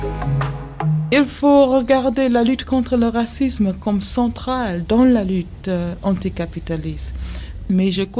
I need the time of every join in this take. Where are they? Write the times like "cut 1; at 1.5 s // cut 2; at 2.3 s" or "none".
cut 1; at 1.1 s